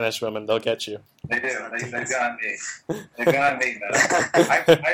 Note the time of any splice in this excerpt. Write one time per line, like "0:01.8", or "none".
0:01.1